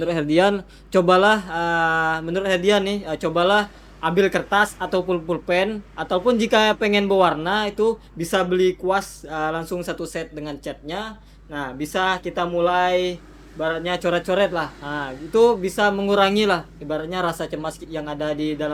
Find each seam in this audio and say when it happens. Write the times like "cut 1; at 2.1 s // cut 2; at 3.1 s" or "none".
none